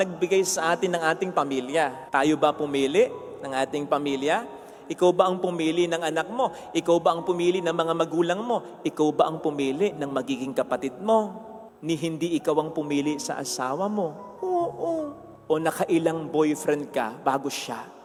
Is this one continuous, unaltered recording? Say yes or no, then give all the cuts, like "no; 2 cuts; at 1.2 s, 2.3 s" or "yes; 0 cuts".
yes; 0 cuts